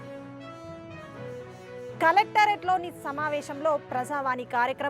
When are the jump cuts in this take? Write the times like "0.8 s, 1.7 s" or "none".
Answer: none